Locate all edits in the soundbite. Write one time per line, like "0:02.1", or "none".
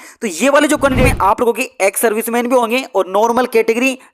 0:01.0